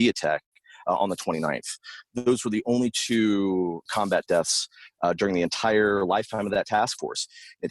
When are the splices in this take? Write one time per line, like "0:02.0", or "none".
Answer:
0:02.1
0:03.9